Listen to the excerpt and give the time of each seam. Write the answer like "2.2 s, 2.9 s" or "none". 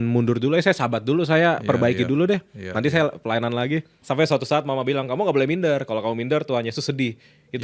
3.9 s